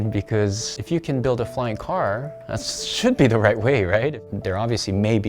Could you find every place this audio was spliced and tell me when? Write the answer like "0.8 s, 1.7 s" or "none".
4.3 s